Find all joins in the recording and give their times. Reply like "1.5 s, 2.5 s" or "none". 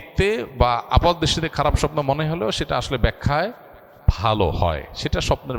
none